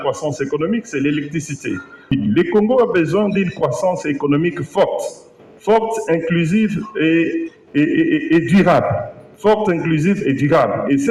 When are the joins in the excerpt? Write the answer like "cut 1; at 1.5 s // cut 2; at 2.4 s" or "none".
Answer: cut 1; at 2.1 s